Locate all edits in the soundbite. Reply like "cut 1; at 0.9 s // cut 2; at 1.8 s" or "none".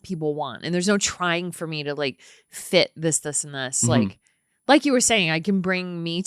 none